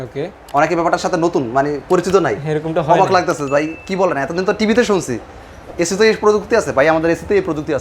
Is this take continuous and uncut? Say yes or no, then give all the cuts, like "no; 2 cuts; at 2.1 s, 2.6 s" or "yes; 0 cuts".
yes; 0 cuts